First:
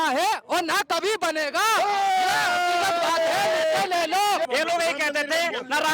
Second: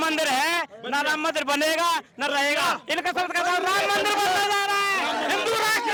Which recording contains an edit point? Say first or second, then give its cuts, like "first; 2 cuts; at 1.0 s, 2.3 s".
first; 1 cut; at 4.5 s